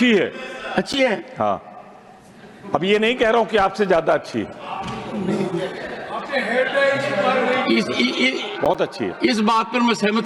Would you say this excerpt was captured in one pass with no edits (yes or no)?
yes